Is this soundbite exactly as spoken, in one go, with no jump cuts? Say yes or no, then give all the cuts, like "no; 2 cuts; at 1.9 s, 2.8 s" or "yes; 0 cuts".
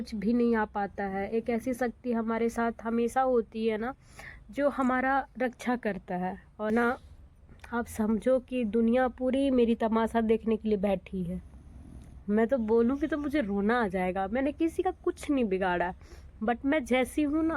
no; 1 cut; at 6.7 s